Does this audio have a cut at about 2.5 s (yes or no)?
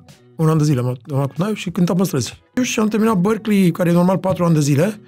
yes